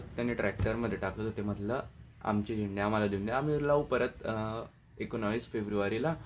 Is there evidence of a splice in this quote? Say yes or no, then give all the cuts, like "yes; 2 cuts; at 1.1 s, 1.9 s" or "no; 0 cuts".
no; 0 cuts